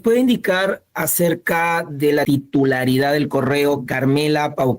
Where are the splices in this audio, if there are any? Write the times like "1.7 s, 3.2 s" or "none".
2.2 s